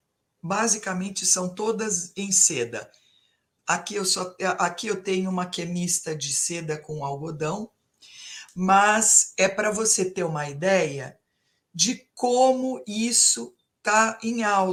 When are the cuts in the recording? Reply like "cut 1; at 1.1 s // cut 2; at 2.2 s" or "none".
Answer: none